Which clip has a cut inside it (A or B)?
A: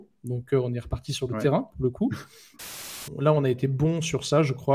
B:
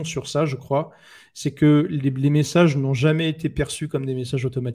A